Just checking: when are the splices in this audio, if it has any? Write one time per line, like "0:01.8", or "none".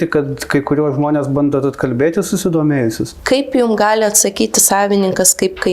0:03.1